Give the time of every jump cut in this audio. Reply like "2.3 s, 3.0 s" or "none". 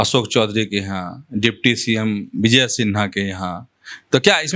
none